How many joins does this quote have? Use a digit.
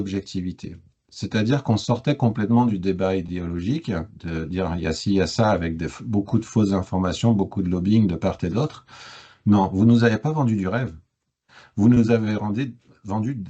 0